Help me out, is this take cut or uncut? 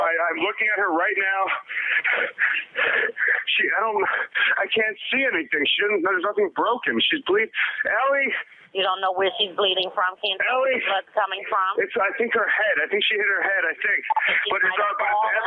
uncut